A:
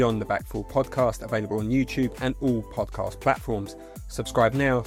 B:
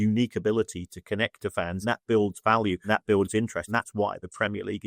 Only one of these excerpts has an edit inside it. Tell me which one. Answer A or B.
B